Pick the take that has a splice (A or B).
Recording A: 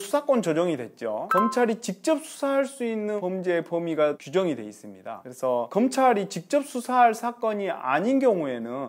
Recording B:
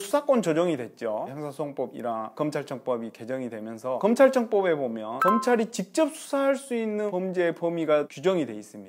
A